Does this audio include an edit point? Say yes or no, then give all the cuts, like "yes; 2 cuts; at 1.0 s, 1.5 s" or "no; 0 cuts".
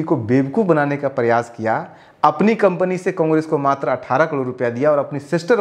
no; 0 cuts